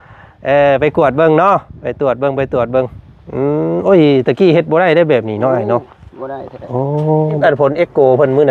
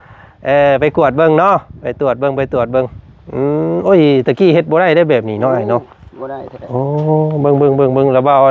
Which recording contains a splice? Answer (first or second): first